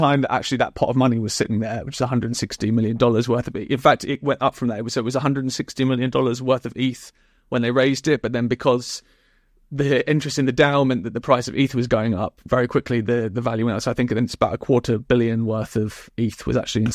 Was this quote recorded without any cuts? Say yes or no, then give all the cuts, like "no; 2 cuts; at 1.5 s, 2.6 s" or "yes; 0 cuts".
yes; 0 cuts